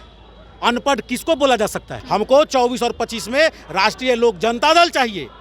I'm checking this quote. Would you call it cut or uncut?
cut